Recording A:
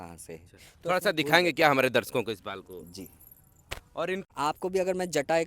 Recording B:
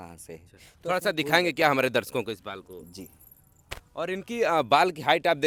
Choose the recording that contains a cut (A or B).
A